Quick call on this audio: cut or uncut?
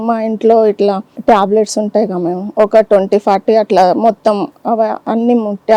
cut